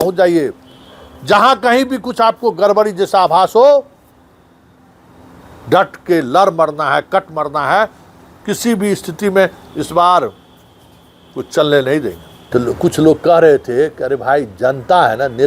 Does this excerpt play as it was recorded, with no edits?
no; 1 cut; at 12.3 s

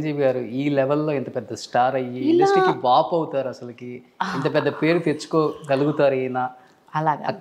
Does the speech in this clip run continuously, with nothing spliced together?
yes; 0 cuts

